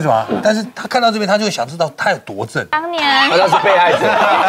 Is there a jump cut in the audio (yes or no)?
yes